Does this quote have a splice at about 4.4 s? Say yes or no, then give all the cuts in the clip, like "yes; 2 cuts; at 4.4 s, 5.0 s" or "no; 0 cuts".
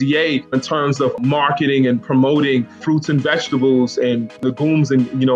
yes; 3 cuts; at 1.0 s, 2.8 s, 4.4 s